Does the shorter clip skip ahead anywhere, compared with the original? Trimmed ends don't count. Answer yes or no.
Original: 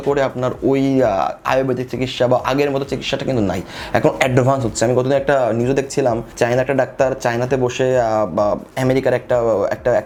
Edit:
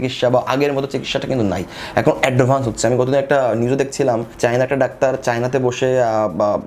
no